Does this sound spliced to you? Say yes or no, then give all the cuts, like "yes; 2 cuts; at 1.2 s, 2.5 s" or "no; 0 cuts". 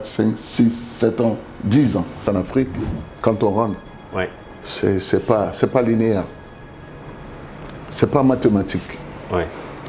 yes; 1 cut; at 2.2 s